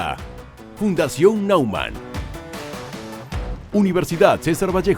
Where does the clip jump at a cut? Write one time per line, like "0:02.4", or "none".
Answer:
0:03.6